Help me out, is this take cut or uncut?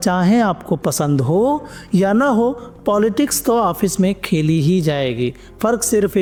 uncut